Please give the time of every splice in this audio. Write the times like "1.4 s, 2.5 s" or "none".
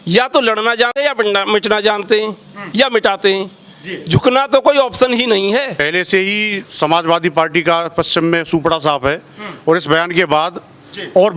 5.8 s